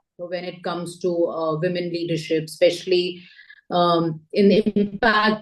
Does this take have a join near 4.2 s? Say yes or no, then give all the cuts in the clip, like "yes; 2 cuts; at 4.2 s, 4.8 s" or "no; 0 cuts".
no; 0 cuts